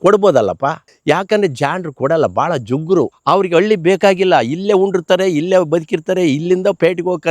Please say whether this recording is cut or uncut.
cut